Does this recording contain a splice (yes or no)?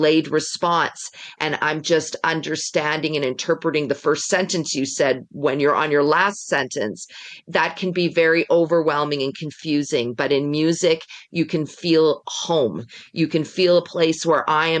no